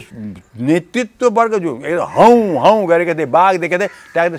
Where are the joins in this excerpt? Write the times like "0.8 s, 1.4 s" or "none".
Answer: none